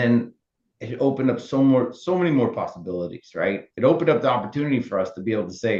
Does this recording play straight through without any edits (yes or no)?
yes